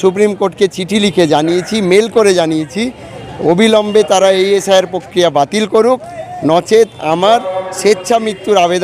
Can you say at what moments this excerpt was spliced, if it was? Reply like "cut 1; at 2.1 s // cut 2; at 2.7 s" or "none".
none